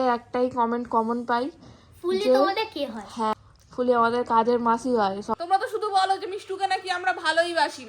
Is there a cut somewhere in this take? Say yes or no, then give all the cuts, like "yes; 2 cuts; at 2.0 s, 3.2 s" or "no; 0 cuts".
yes; 2 cuts; at 3.3 s, 5.3 s